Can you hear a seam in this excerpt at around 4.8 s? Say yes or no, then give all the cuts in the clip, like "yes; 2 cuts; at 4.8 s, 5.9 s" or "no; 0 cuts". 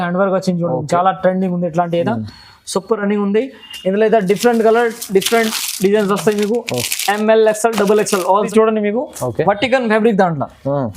no; 1 cut; at 8.5 s